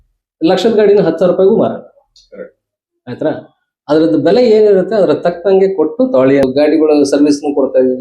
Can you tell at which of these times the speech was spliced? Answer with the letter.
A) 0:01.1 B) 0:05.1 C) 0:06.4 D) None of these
C